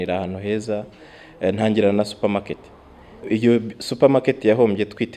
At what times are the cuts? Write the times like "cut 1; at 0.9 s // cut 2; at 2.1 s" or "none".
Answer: cut 1; at 3.2 s